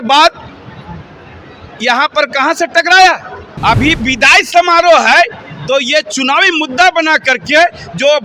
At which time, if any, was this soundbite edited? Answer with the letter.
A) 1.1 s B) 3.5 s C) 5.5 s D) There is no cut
B